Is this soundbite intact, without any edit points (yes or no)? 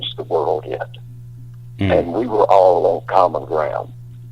yes